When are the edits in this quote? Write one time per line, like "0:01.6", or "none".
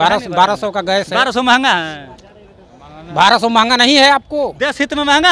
none